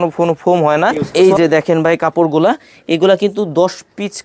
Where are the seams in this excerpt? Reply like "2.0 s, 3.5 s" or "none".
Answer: 1.0 s